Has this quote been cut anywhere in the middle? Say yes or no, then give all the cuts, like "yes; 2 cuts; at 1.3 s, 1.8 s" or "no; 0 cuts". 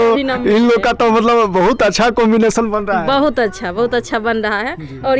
no; 0 cuts